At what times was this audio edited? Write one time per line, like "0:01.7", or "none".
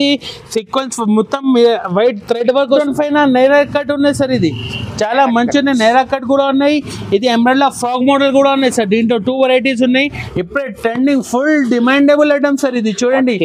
0:02.8
0:10.2